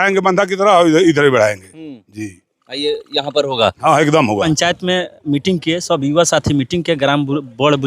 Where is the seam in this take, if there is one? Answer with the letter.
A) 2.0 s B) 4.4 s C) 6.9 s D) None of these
B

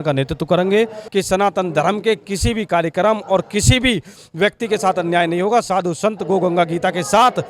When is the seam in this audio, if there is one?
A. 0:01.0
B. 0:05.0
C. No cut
A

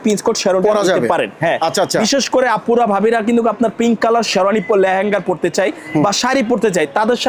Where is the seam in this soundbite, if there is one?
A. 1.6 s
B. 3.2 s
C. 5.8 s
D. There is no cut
D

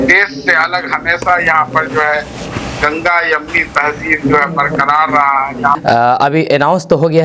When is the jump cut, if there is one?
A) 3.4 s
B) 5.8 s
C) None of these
B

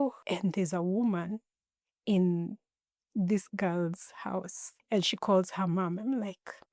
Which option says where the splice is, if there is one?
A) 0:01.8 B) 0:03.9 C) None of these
C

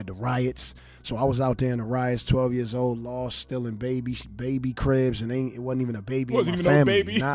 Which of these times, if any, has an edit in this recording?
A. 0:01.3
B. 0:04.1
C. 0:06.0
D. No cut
D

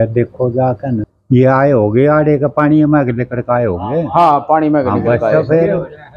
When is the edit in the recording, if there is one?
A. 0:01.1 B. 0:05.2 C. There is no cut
A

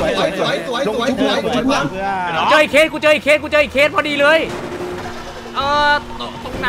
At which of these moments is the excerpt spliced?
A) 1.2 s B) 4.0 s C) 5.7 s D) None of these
D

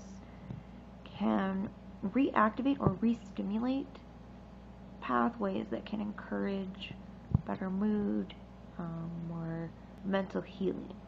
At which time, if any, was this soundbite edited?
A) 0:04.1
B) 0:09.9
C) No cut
B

